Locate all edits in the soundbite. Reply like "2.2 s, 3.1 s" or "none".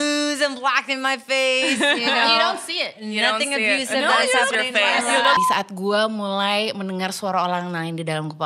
5.4 s